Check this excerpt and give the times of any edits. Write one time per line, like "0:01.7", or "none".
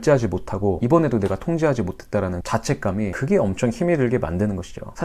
0:00.8
0:02.6